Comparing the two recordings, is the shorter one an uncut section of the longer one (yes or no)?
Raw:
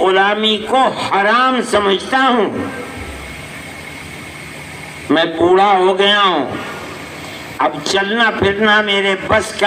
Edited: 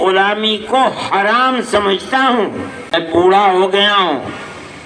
no